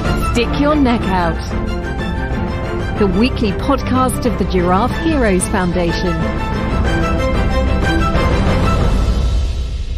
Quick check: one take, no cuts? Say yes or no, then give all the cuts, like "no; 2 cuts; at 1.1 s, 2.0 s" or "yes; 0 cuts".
yes; 0 cuts